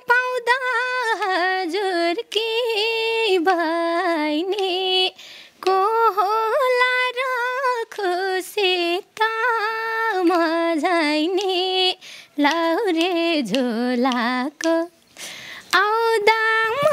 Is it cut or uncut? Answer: uncut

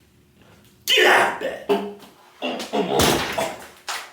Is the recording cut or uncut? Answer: cut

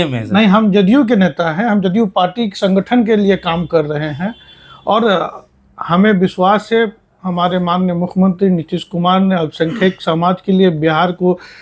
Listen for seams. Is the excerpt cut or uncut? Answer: uncut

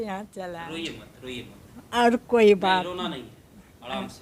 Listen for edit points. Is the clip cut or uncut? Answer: uncut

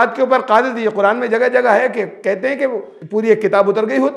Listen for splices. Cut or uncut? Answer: cut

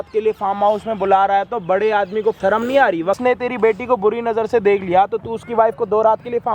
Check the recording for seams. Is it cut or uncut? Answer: cut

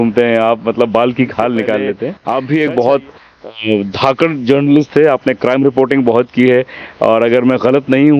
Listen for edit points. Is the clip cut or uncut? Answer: cut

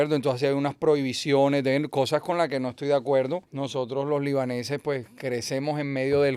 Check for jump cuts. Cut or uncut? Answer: cut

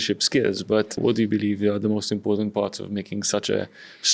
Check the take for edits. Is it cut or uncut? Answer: cut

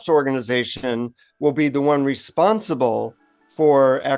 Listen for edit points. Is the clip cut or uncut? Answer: uncut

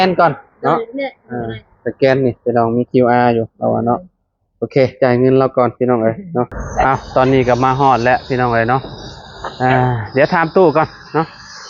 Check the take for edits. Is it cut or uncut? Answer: cut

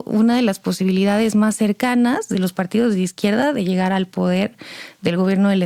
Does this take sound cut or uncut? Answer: uncut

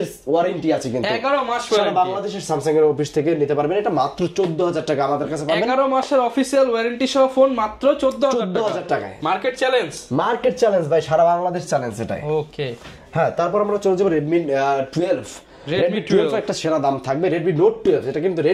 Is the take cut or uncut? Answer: uncut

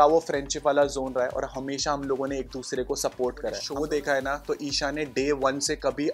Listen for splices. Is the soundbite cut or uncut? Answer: cut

